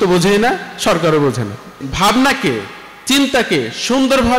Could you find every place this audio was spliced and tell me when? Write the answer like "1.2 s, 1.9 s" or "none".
1.8 s